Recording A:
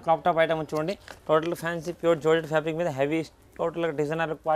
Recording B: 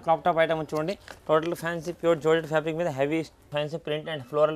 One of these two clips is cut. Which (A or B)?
B